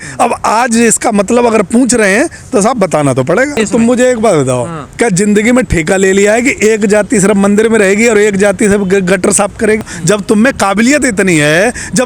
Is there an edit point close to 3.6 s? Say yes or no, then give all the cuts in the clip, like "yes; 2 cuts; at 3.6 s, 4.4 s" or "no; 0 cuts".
yes; 2 cuts; at 3.6 s, 9.9 s